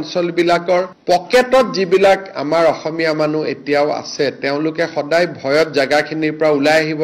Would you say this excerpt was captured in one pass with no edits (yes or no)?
yes